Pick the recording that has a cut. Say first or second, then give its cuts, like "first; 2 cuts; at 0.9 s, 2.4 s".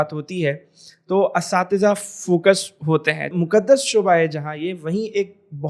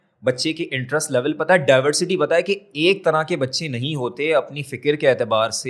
first; 1 cut; at 3.3 s